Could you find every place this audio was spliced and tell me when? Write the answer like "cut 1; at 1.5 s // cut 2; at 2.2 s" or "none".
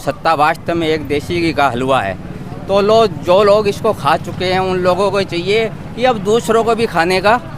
none